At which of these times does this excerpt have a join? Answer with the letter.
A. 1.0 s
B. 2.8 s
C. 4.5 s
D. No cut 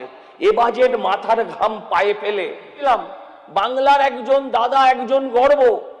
B